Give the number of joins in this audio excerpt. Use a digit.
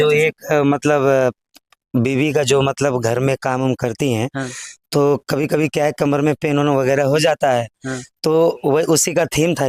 0